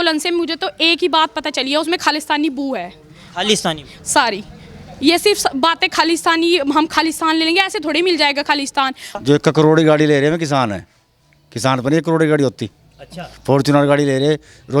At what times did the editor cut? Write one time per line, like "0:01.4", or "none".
0:09.2